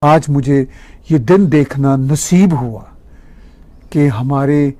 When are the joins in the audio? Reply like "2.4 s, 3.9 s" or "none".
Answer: none